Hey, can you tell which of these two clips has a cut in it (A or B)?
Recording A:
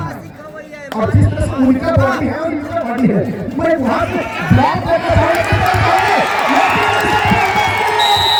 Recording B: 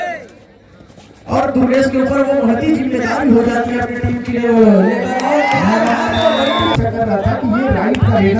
B